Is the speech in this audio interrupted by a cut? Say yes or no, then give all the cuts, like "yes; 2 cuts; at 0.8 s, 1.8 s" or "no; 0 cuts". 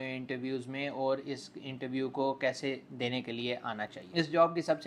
yes; 1 cut; at 3.9 s